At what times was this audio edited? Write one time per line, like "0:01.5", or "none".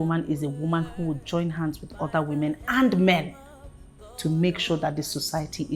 none

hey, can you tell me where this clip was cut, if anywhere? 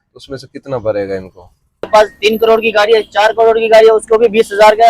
0:01.9

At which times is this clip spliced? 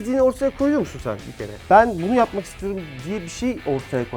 0:01.6

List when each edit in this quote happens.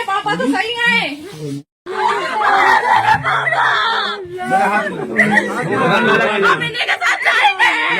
0:01.7

